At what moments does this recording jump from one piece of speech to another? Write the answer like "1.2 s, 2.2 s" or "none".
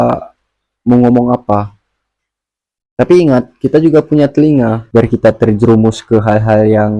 4.8 s